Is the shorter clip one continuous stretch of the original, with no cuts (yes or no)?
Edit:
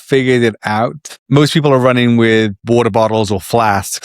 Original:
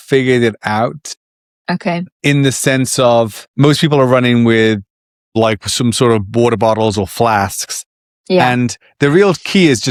no